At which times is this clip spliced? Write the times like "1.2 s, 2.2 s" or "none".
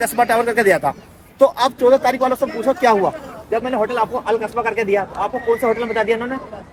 none